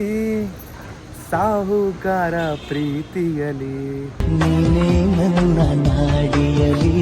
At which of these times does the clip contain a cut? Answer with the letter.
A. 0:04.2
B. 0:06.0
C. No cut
A